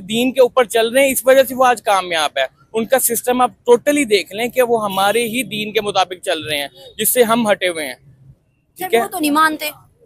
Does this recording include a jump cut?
no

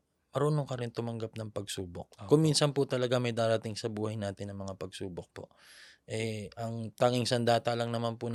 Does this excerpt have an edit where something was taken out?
no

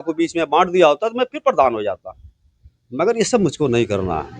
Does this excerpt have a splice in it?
no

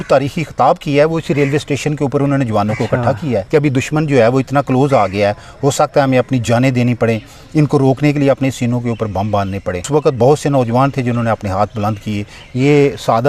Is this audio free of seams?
no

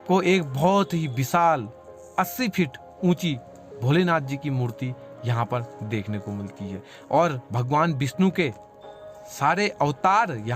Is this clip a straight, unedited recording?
yes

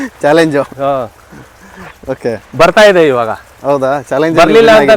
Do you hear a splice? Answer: no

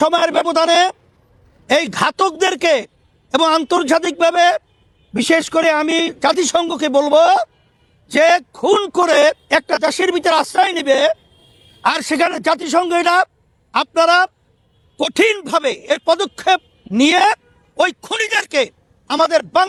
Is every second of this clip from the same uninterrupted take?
yes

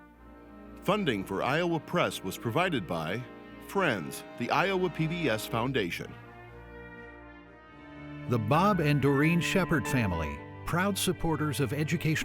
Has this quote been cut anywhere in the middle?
yes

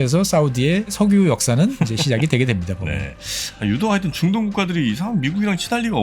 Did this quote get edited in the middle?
yes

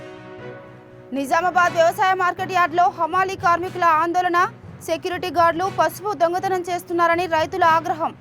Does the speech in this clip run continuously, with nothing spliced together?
yes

